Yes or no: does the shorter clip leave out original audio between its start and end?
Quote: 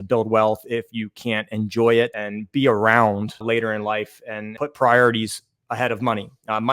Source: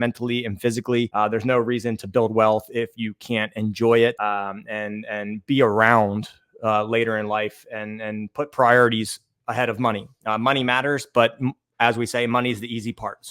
yes